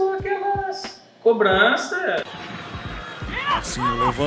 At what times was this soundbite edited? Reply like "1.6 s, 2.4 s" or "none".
2.2 s